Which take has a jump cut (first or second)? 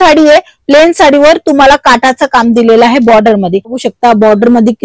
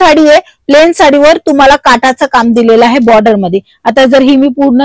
first